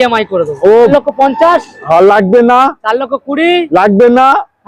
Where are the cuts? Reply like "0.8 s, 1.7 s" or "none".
0.9 s